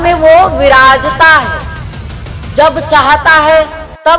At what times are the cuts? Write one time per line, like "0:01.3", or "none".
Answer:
none